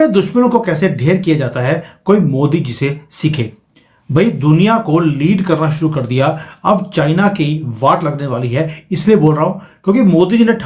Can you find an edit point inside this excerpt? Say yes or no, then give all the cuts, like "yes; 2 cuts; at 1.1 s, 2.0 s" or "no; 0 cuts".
no; 0 cuts